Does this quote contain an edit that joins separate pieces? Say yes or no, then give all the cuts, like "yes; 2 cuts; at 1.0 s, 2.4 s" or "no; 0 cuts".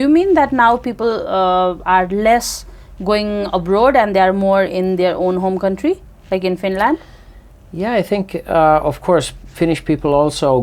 no; 0 cuts